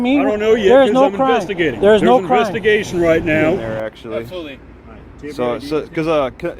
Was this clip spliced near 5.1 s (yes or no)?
no